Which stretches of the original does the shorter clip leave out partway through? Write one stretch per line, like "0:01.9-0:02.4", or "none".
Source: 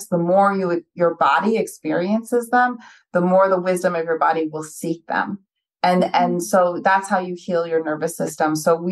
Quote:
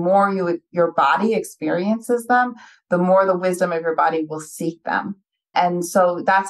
0:05.7-0:06.1